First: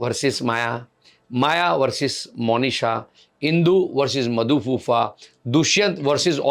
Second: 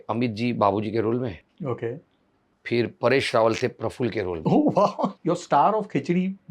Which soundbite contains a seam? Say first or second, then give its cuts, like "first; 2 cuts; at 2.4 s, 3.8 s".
second; 1 cut; at 5.2 s